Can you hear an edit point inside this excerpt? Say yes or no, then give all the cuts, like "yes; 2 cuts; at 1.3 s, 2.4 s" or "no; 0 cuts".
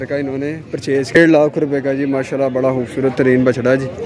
yes; 1 cut; at 1.2 s